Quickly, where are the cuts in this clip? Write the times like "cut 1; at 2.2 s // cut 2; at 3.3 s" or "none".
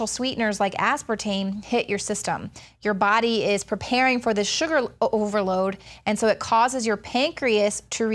cut 1; at 4.2 s